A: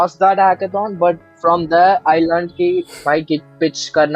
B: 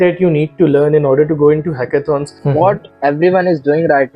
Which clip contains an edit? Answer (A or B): B